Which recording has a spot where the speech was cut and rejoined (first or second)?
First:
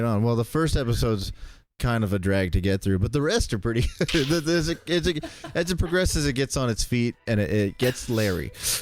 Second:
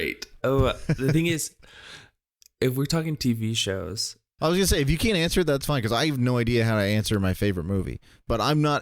second